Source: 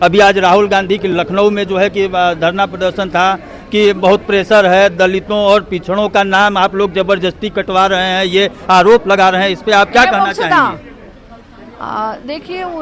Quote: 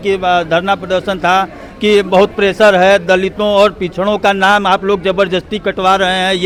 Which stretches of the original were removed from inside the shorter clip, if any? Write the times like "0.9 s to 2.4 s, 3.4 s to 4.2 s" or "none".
none